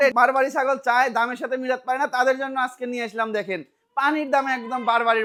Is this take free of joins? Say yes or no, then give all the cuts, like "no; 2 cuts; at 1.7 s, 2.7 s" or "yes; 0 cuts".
yes; 0 cuts